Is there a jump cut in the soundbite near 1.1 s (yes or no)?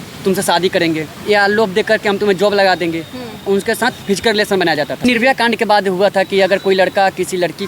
yes